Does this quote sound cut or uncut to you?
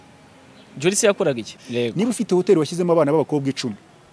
cut